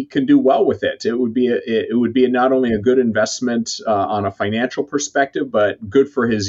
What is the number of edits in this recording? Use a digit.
0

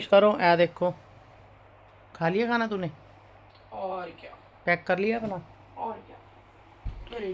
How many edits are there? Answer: 0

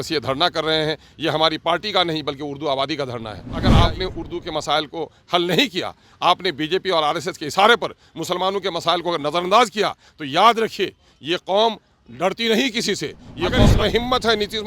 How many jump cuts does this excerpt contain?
2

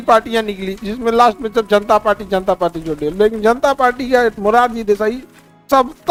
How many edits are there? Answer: 0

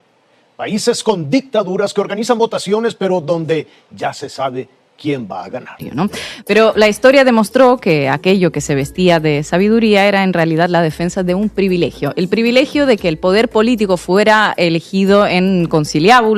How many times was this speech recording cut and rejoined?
1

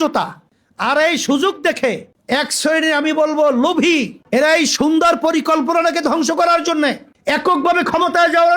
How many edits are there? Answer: 1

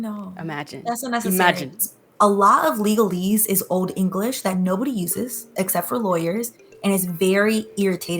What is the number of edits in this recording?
1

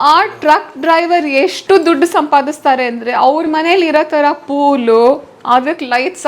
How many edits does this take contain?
1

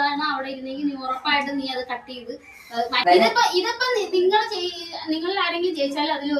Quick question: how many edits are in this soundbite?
1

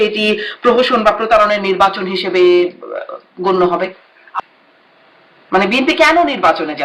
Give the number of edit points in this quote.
1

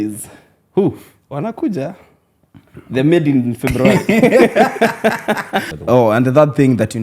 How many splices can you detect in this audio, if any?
1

